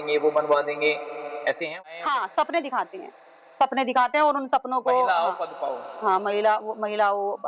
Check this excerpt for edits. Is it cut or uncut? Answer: cut